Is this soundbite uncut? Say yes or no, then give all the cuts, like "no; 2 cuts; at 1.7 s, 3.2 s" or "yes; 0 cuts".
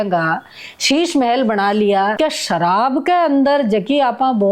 no; 1 cut; at 2.1 s